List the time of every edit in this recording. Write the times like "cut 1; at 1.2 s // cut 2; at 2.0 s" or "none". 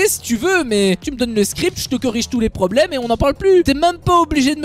cut 1; at 1.0 s // cut 2; at 3.6 s